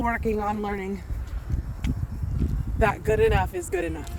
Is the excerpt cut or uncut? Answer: uncut